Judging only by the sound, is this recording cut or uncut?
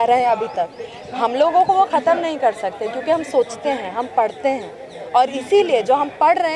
uncut